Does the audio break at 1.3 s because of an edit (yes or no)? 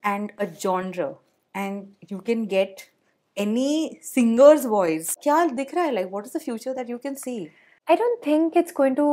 no